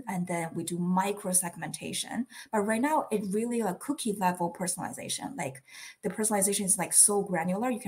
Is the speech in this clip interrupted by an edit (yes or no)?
no